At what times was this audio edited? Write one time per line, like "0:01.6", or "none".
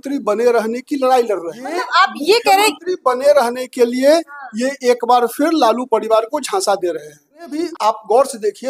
0:01.8
0:07.6